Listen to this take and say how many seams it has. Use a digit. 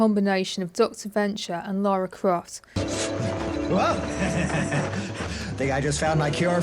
1